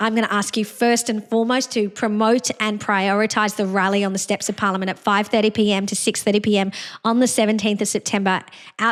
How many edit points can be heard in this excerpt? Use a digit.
0